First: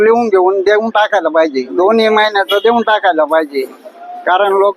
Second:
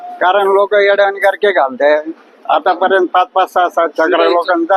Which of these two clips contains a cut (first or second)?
first